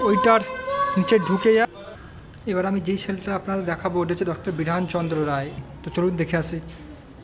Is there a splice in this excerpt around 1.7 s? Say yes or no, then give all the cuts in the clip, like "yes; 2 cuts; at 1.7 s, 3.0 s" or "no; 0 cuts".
yes; 2 cuts; at 1.7 s, 5.6 s